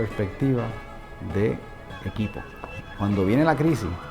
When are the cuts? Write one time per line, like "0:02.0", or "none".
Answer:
0:01.8
0:02.8